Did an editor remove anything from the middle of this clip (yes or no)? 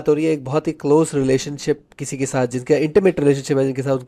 no